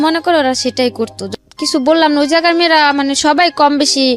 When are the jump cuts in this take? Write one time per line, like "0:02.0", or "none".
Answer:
0:01.2